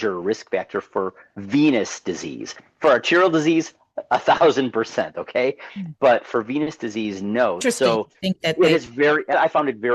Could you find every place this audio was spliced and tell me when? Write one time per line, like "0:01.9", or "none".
none